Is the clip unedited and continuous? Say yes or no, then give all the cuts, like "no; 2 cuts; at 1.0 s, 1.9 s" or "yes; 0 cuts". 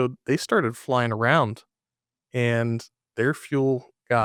yes; 0 cuts